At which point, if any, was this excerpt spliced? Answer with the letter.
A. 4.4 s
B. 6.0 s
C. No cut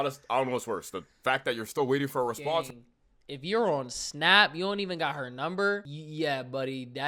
B